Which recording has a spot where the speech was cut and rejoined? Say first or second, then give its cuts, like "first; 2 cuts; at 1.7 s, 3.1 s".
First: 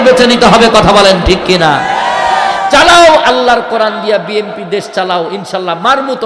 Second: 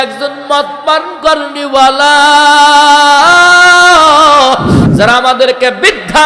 second; 1 cut; at 4.8 s